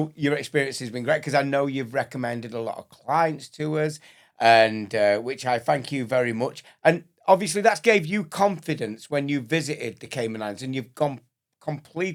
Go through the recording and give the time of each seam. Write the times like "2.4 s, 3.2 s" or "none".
none